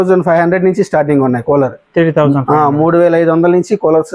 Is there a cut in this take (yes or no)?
no